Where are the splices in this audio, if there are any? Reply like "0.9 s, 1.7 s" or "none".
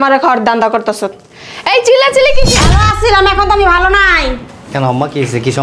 2.6 s